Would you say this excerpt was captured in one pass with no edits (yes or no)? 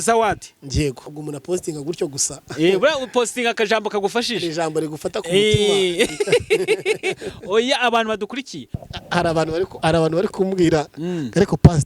no